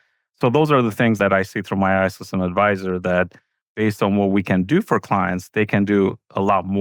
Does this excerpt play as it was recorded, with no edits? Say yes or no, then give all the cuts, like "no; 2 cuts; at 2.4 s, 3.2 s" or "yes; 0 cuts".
yes; 0 cuts